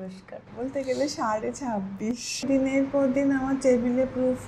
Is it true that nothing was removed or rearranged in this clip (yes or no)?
no